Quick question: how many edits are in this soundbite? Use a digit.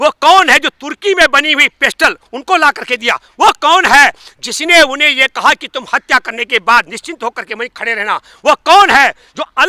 0